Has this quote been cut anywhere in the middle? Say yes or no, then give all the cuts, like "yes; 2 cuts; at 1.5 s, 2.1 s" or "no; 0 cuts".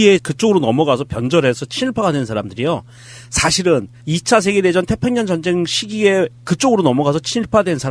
yes; 1 cut; at 1.5 s